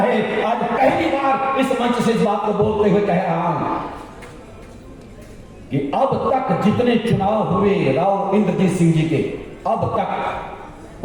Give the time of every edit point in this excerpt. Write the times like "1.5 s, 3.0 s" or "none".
none